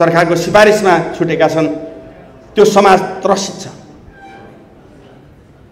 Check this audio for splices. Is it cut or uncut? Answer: uncut